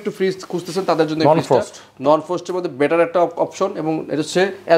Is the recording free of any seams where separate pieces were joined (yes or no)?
yes